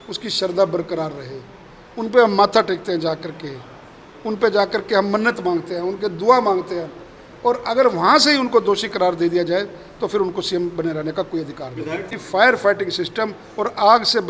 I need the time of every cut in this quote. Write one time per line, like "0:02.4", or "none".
0:12.0